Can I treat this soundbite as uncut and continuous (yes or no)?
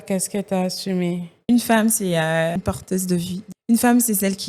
no